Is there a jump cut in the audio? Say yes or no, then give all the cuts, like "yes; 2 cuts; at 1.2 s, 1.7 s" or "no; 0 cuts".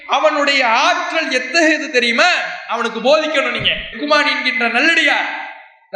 no; 0 cuts